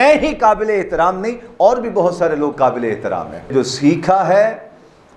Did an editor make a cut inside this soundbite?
yes; 1 cut; at 3.5 s

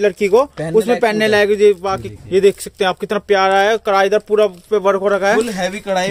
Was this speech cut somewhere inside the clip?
yes; 1 cut; at 2.1 s

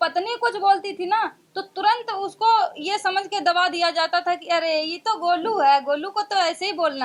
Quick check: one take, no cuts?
yes; 0 cuts

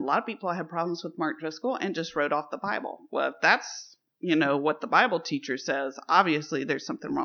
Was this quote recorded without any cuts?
yes; 0 cuts

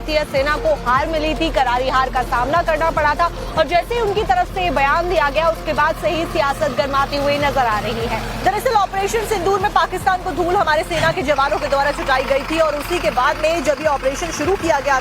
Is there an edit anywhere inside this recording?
yes; 1 cut; at 2.3 s

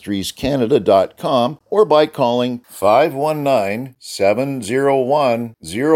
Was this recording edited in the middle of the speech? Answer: yes; 1 cut; at 1.6 s

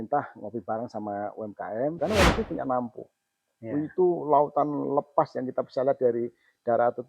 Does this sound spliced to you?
yes; 1 cut; at 2.0 s

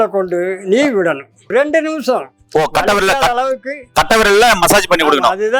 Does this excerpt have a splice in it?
yes; 1 cut; at 1.5 s

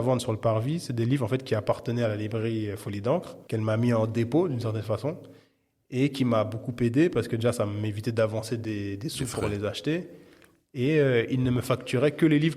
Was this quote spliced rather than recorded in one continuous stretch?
yes; 1 cut; at 3.4 s

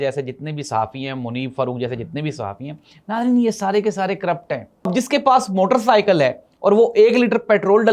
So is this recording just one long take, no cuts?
no; 1 cut; at 4.9 s

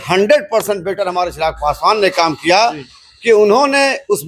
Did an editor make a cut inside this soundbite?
no; 0 cuts

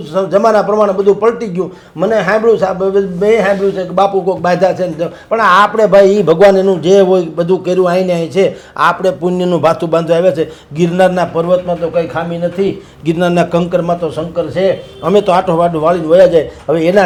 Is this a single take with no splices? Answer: yes; 0 cuts

